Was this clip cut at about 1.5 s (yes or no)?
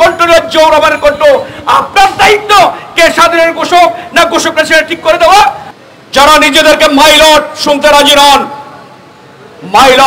no